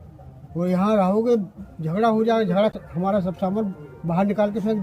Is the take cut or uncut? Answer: cut